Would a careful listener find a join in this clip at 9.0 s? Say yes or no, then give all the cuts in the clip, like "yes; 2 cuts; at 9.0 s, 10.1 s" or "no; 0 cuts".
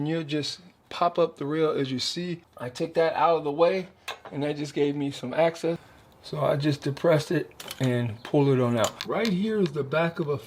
yes; 3 cuts; at 2.6 s, 5.9 s, 9.0 s